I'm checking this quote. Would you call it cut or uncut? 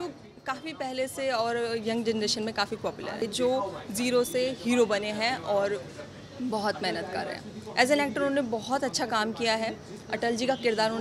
cut